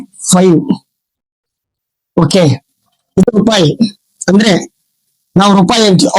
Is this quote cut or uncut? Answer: cut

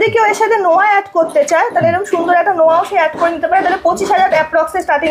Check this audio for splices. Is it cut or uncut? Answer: uncut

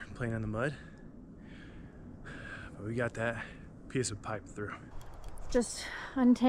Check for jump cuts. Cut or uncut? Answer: cut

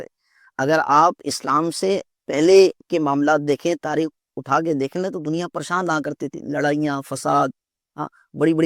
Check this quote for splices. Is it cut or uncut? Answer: uncut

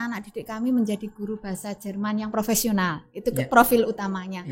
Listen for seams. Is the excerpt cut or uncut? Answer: uncut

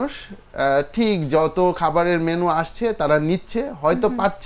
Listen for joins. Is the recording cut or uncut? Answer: uncut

